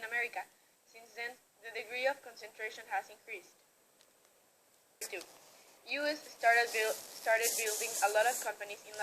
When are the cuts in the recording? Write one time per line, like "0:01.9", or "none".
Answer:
0:05.0